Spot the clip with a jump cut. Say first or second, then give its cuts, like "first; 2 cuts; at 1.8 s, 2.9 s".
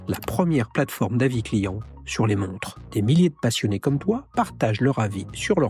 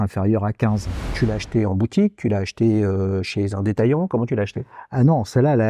second; 1 cut; at 1.1 s